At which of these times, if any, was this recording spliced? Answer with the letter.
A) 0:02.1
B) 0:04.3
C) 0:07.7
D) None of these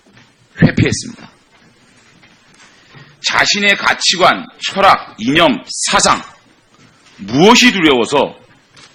C